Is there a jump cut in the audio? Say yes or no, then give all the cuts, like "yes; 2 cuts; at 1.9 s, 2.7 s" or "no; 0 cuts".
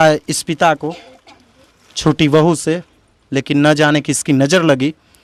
no; 0 cuts